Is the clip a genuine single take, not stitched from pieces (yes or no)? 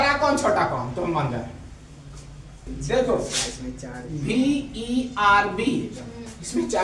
no